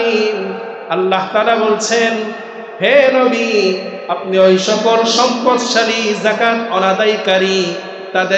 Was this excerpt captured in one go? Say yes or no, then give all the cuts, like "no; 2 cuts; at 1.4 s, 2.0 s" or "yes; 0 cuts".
yes; 0 cuts